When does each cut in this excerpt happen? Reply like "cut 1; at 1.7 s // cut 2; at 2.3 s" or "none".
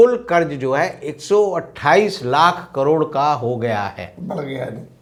none